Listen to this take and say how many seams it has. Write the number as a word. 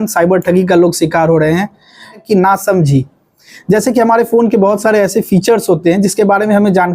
one